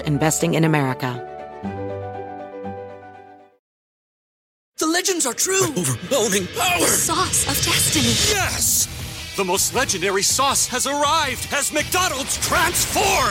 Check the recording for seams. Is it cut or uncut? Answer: cut